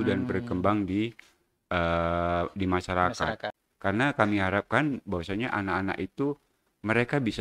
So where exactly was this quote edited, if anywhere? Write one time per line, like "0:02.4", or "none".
0:03.5

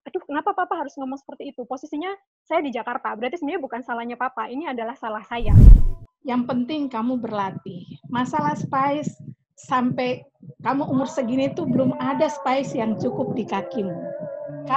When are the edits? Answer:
0:05.6

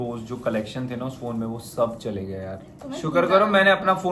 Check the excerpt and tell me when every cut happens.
0:02.7

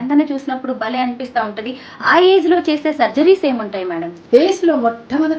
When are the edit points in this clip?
0:04.1

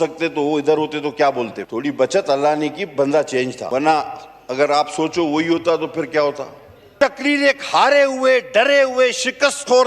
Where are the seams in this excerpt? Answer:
0:01.6
0:03.6
0:06.9

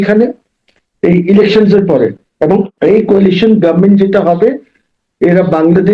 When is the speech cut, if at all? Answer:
0:02.7

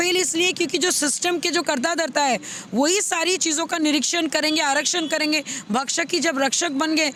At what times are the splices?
none

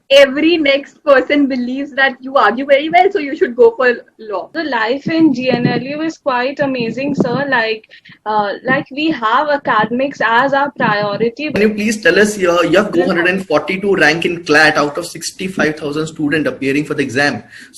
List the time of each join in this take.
0:04.5
0:11.6
0:12.9

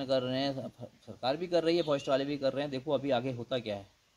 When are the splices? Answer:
none

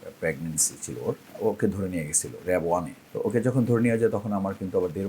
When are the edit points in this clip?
0:01.3
0:03.0

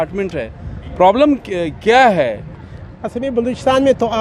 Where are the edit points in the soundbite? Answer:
none

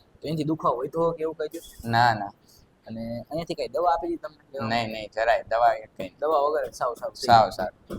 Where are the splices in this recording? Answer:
none

